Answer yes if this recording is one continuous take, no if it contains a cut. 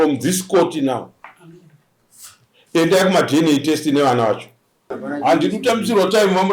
no